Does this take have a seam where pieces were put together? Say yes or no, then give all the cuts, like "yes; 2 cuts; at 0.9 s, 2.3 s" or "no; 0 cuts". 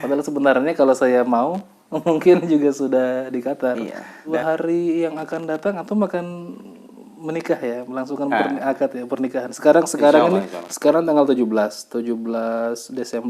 yes; 1 cut; at 4.3 s